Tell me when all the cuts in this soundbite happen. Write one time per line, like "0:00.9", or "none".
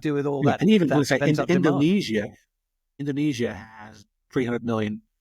0:02.9
0:04.1